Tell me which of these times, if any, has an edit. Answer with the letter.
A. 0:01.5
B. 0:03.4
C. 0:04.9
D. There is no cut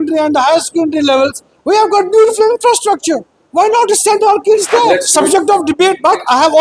C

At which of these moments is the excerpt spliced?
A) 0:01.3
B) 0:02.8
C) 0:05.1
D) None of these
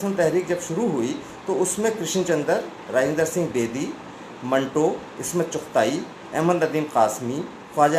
D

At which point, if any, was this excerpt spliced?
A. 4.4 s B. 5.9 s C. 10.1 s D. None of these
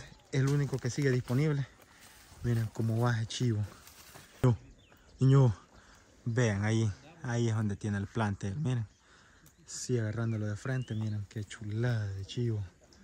A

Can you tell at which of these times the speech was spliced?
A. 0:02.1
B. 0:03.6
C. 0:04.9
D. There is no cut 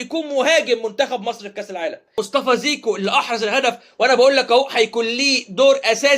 A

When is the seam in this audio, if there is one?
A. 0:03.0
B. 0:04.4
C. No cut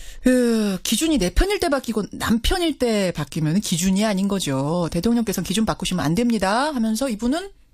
A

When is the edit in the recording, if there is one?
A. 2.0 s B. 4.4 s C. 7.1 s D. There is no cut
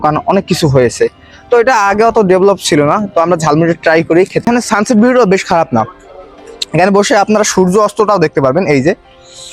B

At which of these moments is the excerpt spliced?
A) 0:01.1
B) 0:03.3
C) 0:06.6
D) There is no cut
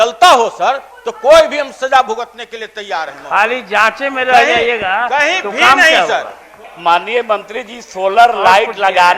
C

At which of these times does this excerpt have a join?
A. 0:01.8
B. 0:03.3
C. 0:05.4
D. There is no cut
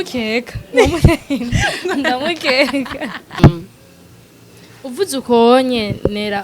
B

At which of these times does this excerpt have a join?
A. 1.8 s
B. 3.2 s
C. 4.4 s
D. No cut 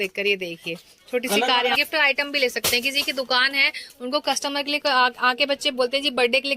A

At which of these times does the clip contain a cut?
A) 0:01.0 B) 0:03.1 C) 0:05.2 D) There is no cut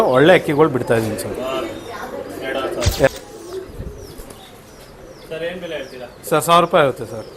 B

